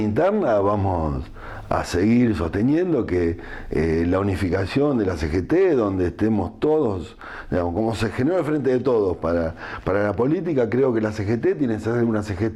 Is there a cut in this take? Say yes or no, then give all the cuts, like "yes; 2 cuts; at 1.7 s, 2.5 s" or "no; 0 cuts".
no; 0 cuts